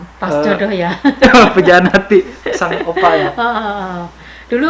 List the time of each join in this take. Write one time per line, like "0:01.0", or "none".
none